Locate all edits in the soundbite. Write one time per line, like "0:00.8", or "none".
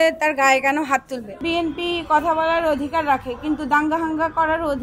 0:01.4